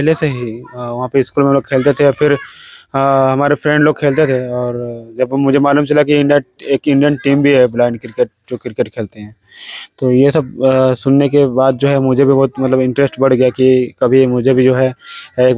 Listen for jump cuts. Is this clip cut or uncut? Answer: uncut